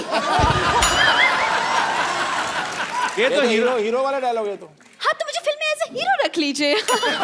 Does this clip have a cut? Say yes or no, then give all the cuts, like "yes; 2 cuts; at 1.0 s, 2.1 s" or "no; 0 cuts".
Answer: no; 0 cuts